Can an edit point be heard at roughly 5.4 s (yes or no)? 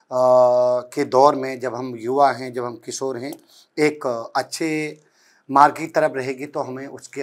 no